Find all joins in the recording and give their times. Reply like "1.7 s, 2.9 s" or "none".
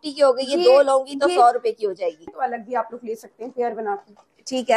2.3 s